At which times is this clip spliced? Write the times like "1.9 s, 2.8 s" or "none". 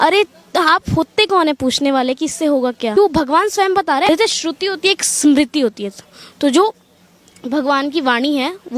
3.0 s, 4.1 s